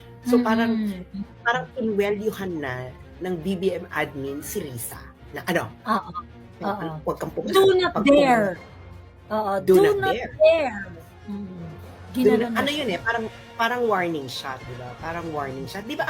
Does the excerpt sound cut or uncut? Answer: uncut